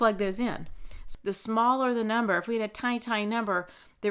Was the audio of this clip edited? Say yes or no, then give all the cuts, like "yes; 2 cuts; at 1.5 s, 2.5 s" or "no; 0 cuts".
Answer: yes; 1 cut; at 1.0 s